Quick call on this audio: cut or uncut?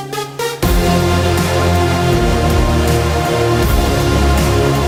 uncut